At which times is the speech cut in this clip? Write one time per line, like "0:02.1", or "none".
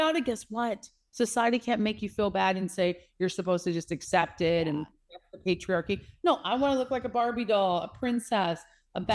none